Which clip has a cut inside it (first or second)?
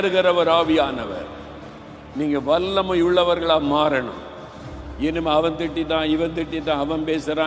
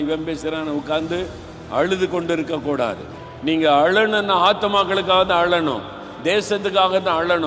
second